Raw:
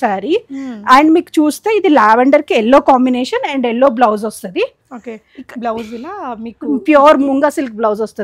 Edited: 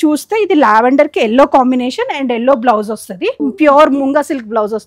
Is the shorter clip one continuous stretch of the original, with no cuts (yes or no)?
no